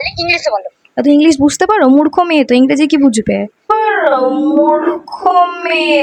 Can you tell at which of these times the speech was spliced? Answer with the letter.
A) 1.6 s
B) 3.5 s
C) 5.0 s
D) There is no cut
D